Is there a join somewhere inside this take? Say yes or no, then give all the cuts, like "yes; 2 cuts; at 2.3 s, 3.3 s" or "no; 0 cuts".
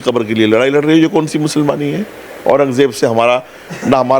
no; 0 cuts